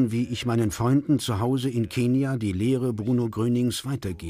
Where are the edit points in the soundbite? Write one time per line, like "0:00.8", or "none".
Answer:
0:03.3

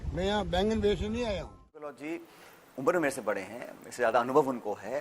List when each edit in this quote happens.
0:02.0

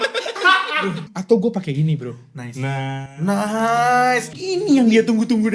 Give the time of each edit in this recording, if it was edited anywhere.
0:01.1
0:04.3

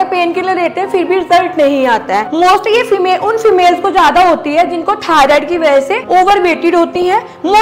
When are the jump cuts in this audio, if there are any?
none

